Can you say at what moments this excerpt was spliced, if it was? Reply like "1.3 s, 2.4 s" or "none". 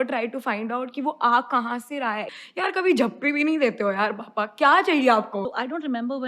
2.4 s, 5.4 s